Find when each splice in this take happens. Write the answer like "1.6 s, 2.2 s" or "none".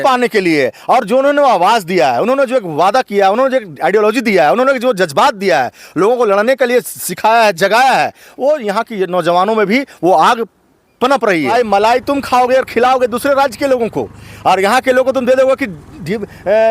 11.5 s